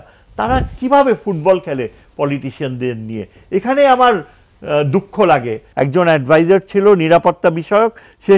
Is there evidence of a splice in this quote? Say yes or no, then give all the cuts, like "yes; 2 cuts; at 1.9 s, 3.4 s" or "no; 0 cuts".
yes; 1 cut; at 5.6 s